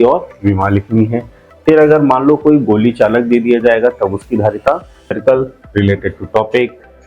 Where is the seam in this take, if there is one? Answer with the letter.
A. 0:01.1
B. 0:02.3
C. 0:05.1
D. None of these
C